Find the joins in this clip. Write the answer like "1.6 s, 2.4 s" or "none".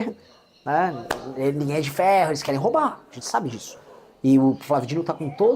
none